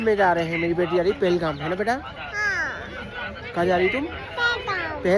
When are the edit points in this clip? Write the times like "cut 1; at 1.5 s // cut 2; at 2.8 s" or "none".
none